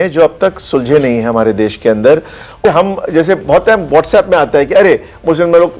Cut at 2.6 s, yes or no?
yes